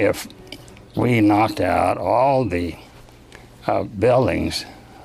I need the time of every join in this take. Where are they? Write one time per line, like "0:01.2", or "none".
0:02.9